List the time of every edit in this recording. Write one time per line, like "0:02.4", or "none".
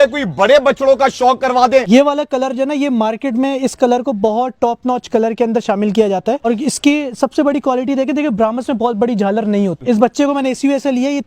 0:01.9
0:06.5
0:09.8